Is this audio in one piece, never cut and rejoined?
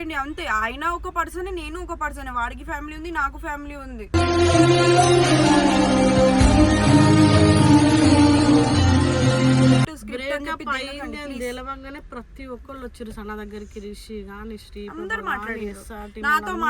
no; 1 cut; at 10.0 s

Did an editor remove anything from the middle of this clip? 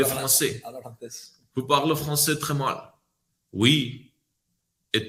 no; 0 cuts

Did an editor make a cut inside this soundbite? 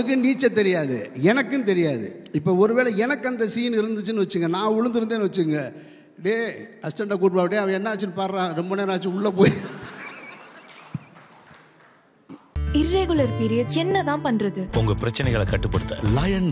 yes; 1 cut; at 12.5 s

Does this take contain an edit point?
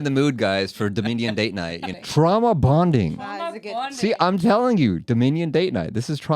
yes; 1 cut; at 1.9 s

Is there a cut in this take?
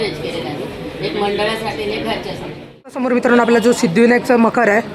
yes; 1 cut; at 3.0 s

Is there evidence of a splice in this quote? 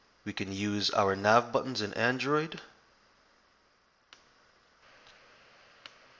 yes; 1 cut; at 4.8 s

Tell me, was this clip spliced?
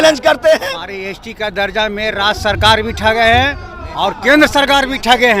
yes; 1 cut; at 1.0 s

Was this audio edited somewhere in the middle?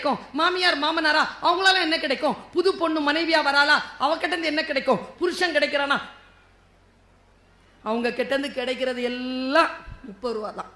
no; 0 cuts

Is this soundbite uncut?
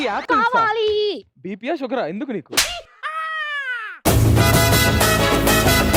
yes; 0 cuts

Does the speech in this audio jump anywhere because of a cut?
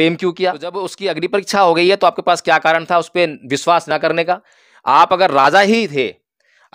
yes; 1 cut; at 1.0 s

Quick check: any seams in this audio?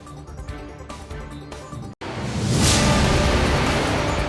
no; 0 cuts

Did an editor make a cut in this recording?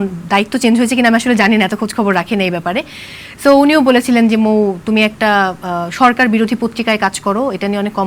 no; 0 cuts

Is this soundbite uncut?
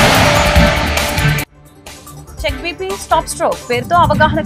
yes; 0 cuts

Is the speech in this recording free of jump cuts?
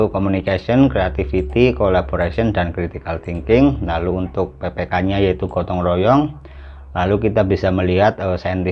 yes; 0 cuts

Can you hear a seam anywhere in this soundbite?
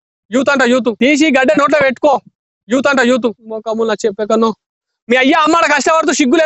yes; 2 cuts; at 1.0 s, 3.3 s

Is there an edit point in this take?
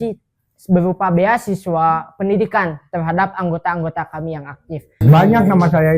yes; 1 cut; at 5.0 s

